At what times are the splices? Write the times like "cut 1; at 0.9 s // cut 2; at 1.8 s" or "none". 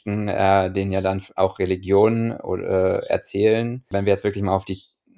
cut 1; at 3.8 s